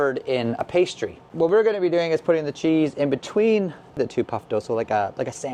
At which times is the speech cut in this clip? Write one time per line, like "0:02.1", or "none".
none